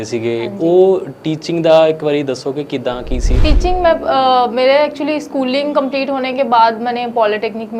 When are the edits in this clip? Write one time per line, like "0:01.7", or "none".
0:03.4